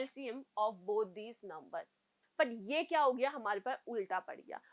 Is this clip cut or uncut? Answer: cut